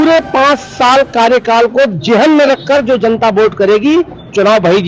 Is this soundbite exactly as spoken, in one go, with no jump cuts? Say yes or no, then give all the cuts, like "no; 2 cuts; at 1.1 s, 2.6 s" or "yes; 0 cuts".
yes; 0 cuts